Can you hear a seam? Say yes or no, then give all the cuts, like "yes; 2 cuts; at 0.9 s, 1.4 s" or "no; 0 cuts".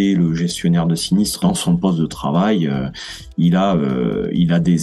yes; 1 cut; at 1.4 s